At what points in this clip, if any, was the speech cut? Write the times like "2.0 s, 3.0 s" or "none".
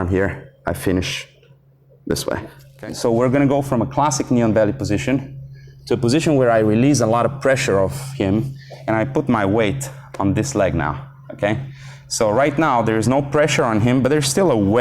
2.6 s